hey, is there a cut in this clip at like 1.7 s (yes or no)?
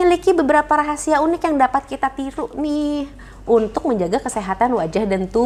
no